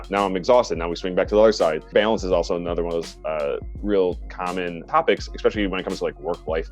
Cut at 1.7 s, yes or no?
no